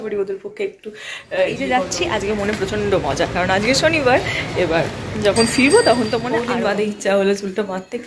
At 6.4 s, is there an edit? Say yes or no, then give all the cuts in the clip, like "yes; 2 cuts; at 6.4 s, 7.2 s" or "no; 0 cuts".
yes; 2 cuts; at 1.9 s, 6.4 s